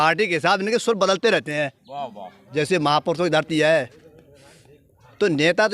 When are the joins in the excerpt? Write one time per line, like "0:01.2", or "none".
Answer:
0:02.5